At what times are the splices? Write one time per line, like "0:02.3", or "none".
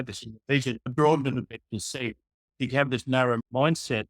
0:00.9
0:03.4